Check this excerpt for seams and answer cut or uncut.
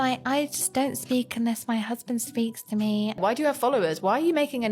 cut